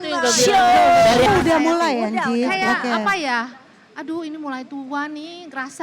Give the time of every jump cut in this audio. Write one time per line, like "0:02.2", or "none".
0:01.3